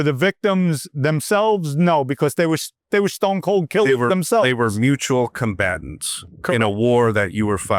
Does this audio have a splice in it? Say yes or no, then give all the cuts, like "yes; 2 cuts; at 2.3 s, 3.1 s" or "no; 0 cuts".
no; 0 cuts